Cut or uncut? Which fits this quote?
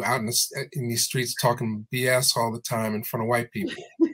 uncut